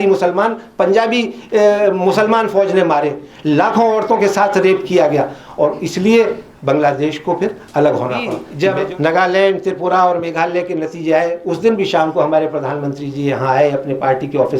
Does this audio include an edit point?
yes; 1 cut; at 8.4 s

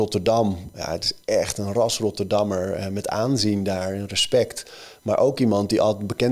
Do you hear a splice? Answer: no; 0 cuts

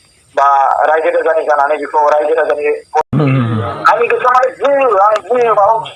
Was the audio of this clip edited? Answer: yes; 1 cut; at 3.1 s

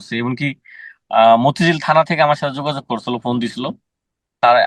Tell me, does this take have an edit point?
no; 0 cuts

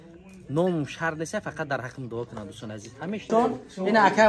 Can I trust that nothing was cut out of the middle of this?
no; 1 cut; at 3.3 s

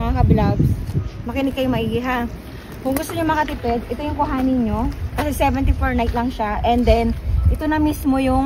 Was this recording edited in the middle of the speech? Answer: no; 0 cuts

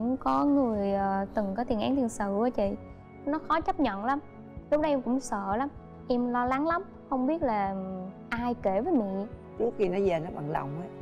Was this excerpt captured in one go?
no; 1 cut; at 9.4 s

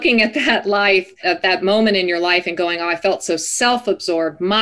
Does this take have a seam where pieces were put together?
yes; 1 cut; at 1.1 s

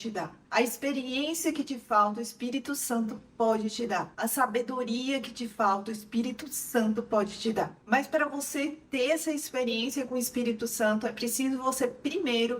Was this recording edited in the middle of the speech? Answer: yes; 1 cut; at 7.8 s

